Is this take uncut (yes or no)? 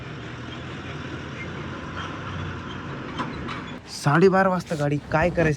no